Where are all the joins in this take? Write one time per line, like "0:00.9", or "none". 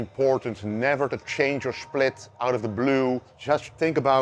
0:03.3